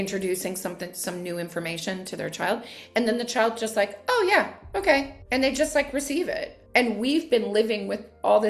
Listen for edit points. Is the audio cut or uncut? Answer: cut